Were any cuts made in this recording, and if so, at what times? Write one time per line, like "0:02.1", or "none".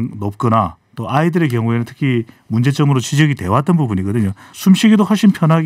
0:04.4